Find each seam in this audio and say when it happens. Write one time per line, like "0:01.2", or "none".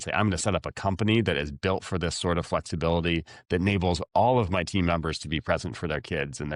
none